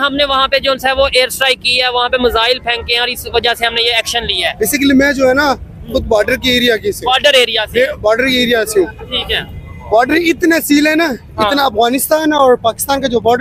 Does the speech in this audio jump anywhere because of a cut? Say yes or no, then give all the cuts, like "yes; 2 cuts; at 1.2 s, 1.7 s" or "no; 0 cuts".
no; 0 cuts